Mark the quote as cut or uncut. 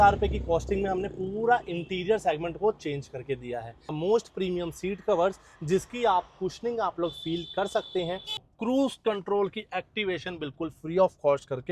cut